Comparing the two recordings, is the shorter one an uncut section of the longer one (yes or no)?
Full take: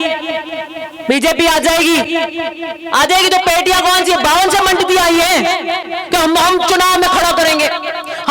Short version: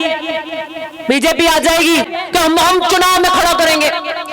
no